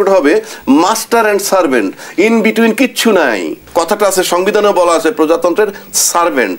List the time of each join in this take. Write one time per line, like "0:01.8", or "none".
0:03.6